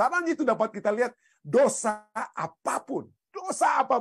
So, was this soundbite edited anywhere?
no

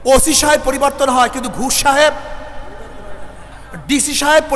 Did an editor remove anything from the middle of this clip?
yes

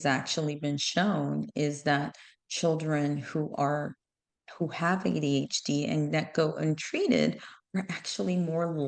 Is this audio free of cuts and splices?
yes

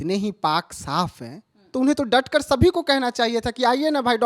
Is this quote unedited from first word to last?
yes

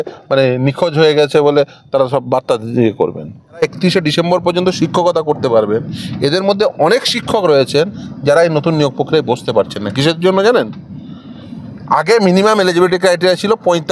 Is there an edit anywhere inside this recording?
yes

